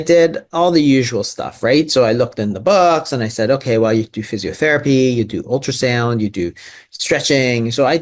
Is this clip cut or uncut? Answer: uncut